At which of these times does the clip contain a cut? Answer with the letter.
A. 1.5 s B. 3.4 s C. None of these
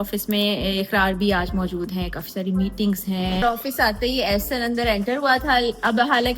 B